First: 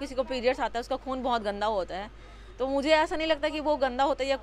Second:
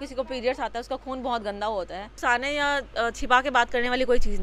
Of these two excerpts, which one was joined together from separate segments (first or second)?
second